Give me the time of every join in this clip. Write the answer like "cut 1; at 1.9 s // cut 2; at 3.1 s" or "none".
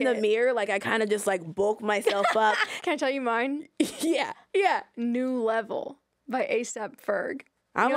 cut 1; at 2.7 s // cut 2; at 4.9 s